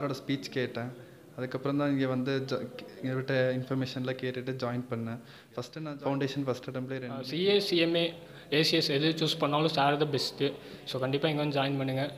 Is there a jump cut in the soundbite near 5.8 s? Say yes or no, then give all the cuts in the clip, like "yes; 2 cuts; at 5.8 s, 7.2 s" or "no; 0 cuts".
yes; 2 cuts; at 5.8 s, 7.2 s